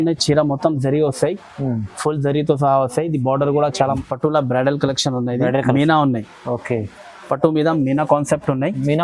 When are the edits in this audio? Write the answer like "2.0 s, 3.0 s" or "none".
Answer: 4.0 s